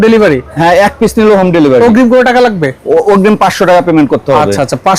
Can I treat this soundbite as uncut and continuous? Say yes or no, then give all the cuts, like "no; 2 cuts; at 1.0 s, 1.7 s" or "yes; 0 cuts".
yes; 0 cuts